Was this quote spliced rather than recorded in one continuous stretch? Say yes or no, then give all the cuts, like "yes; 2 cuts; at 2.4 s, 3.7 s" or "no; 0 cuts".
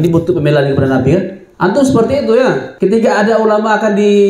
yes; 2 cuts; at 1.4 s, 2.7 s